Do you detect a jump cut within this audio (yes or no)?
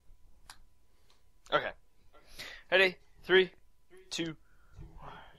no